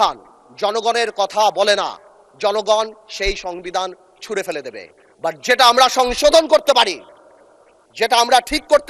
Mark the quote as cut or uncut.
uncut